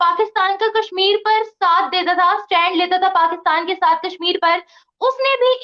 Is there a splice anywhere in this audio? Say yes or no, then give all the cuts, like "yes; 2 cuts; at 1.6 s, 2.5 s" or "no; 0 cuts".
no; 0 cuts